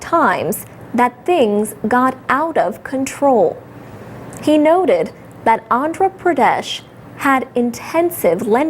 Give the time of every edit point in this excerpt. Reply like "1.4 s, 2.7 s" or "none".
1.0 s

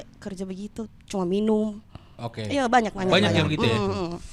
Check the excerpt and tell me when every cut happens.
none

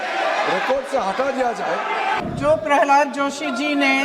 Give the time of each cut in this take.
2.2 s

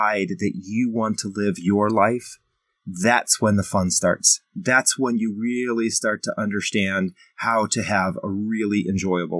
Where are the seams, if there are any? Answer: none

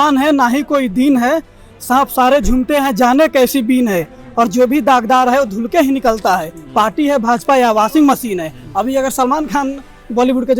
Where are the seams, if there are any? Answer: none

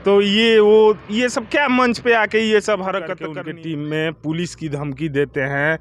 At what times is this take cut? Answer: 3.2 s

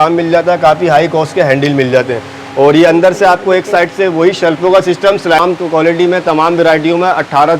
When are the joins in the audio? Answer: 5.4 s

